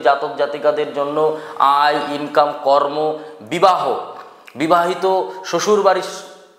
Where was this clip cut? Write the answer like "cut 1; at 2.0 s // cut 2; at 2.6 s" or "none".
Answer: none